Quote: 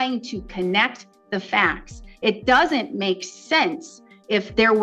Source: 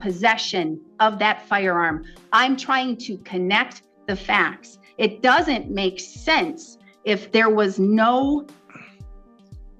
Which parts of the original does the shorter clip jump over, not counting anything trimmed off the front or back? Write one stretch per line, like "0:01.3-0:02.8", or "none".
none